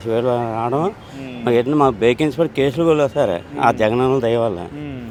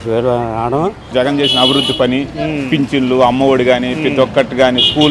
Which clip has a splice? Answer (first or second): second